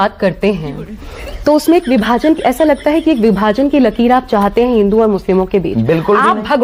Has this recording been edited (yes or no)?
no